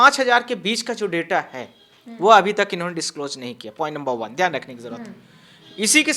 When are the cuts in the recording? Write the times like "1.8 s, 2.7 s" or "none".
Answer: none